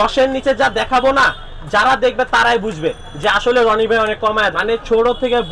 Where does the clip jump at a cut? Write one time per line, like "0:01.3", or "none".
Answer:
0:04.6